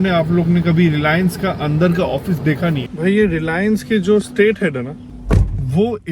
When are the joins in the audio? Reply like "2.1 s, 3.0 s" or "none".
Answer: 2.9 s, 5.1 s